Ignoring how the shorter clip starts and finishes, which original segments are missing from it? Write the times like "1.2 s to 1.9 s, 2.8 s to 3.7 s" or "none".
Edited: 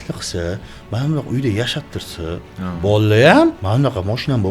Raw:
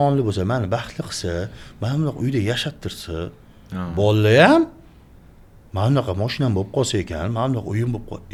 3.4 s to 3.6 s, 4.7 s to 5.7 s